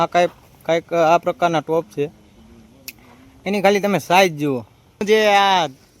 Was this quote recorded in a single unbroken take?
no; 1 cut; at 5.0 s

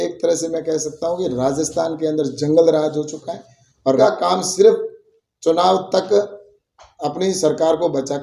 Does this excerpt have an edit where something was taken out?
yes; 1 cut; at 4.0 s

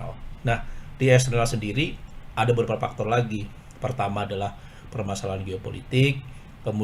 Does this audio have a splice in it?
no; 0 cuts

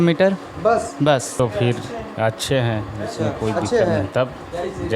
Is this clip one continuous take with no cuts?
no; 1 cut; at 1.3 s

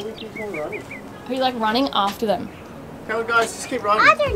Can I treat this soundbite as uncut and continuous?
yes; 0 cuts

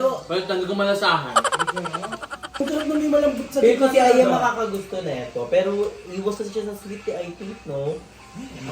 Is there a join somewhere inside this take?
yes; 1 cut; at 2.6 s

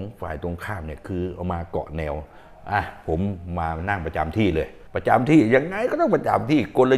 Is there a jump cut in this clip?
no; 0 cuts

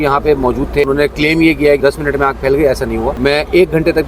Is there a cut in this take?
yes; 3 cuts; at 0.8 s, 1.8 s, 3.1 s

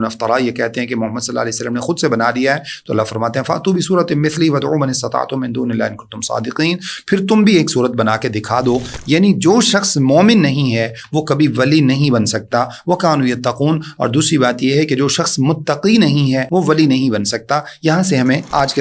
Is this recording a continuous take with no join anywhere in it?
no; 2 cuts; at 8.9 s, 16.4 s

